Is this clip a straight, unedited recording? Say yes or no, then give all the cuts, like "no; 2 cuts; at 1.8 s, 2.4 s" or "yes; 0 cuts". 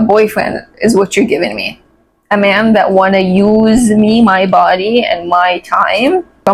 yes; 0 cuts